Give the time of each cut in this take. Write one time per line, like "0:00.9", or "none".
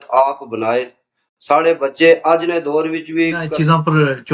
0:03.4